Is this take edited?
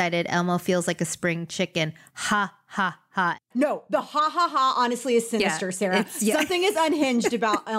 yes; 1 cut; at 3.5 s

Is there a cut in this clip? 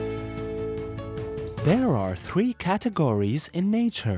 yes; 1 cut; at 1.6 s

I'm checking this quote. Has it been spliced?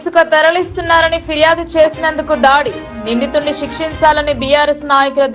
no; 0 cuts

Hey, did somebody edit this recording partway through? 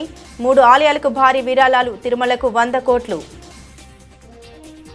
yes; 1 cut; at 3.3 s

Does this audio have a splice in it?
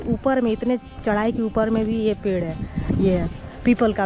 no; 0 cuts

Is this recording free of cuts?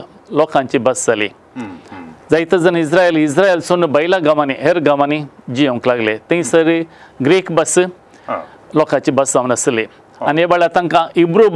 yes; 0 cuts

